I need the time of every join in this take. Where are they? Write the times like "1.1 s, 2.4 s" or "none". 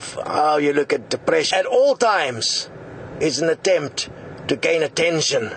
none